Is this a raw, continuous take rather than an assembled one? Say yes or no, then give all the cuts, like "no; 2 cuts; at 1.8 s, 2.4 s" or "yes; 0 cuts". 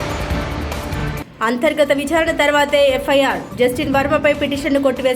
no; 1 cut; at 1.1 s